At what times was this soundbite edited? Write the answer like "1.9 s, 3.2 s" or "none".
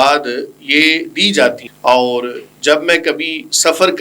1.7 s

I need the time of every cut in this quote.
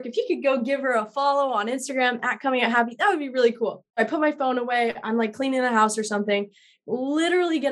3.9 s

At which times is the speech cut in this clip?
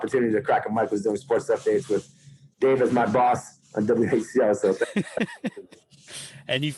none

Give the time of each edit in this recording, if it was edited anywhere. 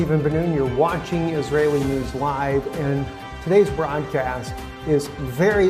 4.4 s

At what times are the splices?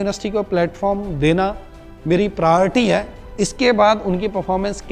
none

